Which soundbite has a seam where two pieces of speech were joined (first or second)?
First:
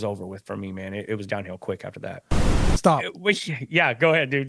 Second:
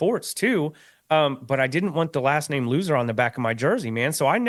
first